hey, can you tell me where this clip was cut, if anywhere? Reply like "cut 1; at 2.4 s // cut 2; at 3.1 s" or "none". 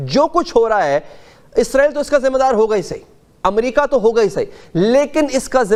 none